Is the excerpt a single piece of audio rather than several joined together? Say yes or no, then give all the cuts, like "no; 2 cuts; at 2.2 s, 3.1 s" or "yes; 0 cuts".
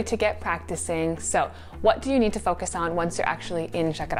yes; 0 cuts